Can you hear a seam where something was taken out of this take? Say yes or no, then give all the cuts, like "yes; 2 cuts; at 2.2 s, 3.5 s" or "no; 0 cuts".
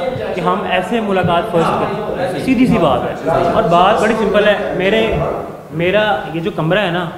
no; 0 cuts